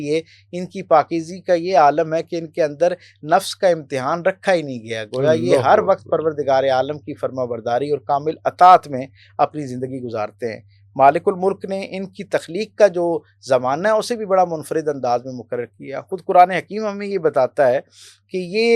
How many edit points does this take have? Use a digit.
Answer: 0